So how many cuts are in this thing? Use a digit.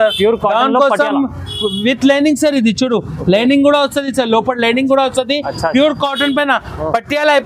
0